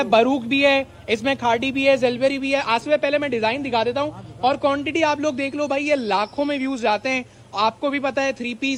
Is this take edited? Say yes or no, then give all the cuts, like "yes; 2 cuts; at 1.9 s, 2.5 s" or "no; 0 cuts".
no; 0 cuts